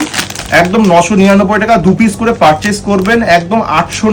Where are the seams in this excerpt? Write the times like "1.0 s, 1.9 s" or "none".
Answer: none